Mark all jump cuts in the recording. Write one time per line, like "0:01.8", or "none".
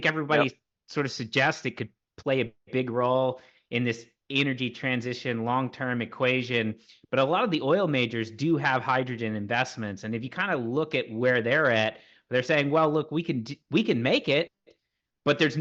none